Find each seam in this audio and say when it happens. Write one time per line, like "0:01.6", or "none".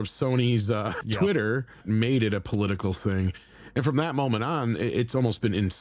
0:01.0
0:01.8